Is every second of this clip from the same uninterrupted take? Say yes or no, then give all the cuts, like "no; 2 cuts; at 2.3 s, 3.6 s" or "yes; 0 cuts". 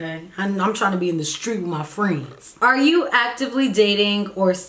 no; 1 cut; at 2.4 s